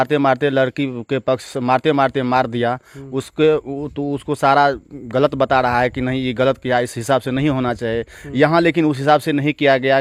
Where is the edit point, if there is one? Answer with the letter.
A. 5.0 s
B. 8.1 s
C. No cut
C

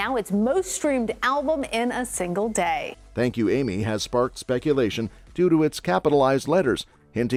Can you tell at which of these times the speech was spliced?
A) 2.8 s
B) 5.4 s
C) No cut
C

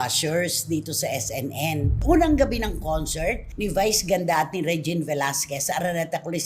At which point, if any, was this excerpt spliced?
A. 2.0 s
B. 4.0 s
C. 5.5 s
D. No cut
A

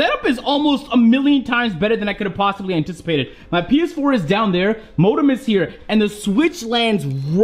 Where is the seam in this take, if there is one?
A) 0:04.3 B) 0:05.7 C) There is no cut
C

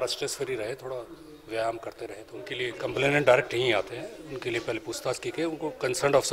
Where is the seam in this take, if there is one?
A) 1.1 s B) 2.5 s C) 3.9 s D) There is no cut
B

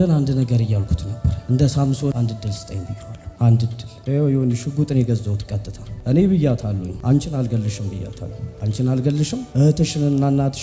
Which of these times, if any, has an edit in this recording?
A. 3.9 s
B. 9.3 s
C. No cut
A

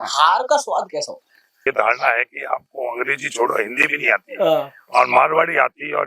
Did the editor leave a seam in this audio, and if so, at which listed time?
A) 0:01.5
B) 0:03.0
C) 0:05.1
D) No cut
A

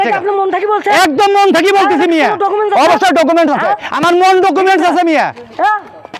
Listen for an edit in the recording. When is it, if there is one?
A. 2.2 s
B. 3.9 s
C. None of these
C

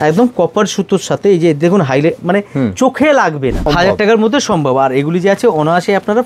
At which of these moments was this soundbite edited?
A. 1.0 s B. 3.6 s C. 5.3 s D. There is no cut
B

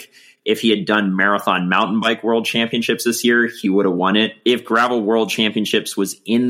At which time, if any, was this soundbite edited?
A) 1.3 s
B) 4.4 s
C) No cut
B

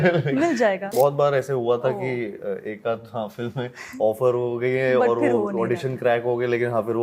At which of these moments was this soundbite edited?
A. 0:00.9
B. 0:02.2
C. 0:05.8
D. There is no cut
A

